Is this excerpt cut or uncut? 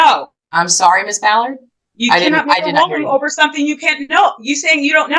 uncut